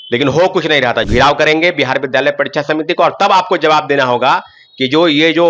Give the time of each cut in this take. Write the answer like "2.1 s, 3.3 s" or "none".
1.1 s